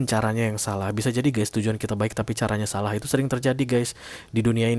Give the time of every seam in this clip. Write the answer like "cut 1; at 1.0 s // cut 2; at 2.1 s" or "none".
none